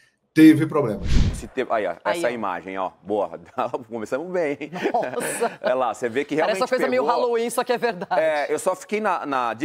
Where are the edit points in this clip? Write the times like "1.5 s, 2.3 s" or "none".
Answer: 1.4 s